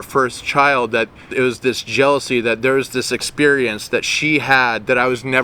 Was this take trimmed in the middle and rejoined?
yes; 1 cut; at 1.3 s

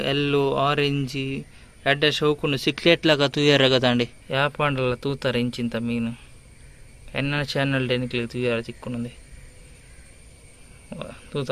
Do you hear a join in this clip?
yes; 1 cut; at 4.2 s

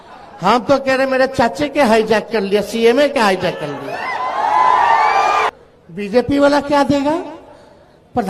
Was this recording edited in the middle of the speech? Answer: yes; 1 cut; at 5.5 s

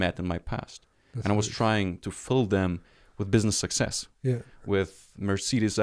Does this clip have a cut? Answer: no; 0 cuts

